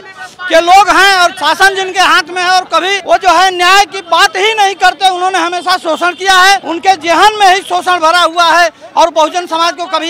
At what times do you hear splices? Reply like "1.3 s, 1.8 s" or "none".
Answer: 3.0 s, 6.7 s